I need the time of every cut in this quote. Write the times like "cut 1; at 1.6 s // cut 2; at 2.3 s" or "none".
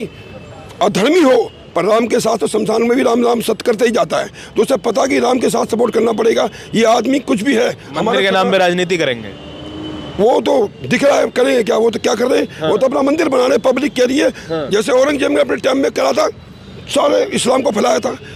none

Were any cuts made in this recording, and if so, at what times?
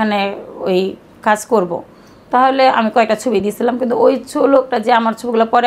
none

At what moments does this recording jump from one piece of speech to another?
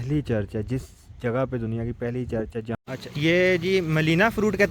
cut 1; at 2.8 s

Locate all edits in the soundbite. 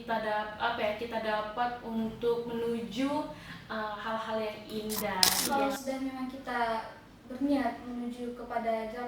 cut 1; at 5.4 s

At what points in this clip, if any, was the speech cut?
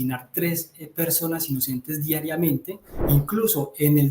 cut 1; at 2.9 s

